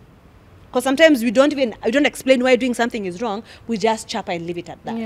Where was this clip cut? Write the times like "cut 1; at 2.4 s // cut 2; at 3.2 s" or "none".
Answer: none